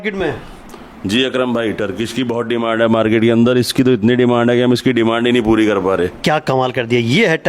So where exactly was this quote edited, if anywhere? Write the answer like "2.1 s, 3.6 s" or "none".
6.2 s